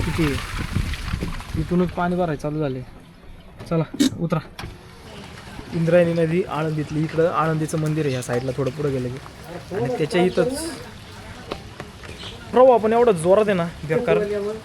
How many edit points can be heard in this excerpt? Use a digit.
1